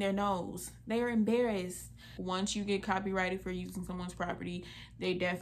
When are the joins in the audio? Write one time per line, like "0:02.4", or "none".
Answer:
0:02.2

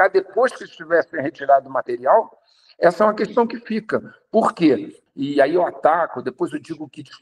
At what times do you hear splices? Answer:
0:04.9

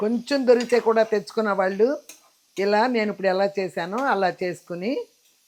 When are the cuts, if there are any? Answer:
none

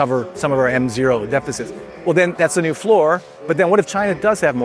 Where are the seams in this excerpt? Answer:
none

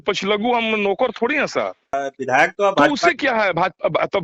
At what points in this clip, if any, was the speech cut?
0:02.0

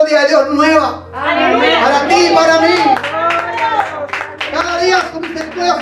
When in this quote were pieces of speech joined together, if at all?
none

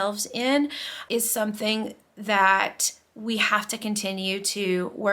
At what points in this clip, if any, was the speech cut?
0:01.0

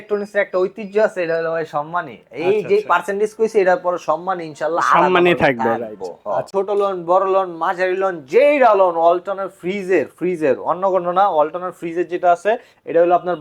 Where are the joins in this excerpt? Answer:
0:06.5

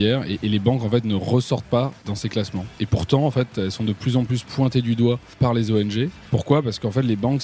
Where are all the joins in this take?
0:02.1
0:05.4
0:06.2

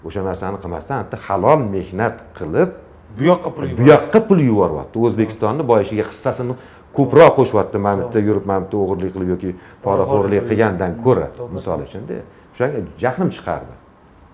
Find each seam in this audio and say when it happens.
none

